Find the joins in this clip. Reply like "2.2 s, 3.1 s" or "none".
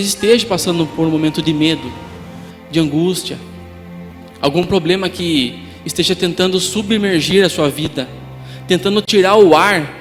none